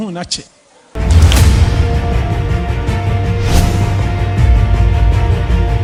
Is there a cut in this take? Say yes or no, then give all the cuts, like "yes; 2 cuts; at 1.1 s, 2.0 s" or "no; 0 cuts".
no; 0 cuts